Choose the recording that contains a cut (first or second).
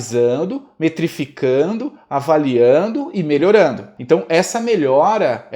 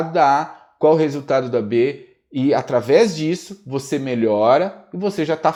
first